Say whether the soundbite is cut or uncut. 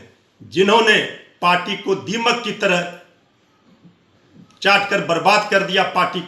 uncut